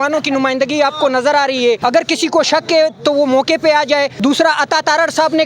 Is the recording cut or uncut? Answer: cut